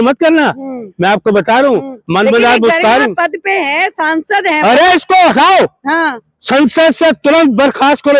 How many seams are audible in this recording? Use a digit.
0